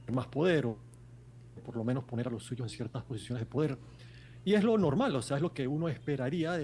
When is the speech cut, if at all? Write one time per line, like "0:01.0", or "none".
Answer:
none